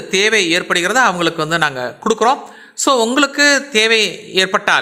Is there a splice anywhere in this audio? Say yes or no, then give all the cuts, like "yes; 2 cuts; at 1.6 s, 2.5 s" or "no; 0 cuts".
no; 0 cuts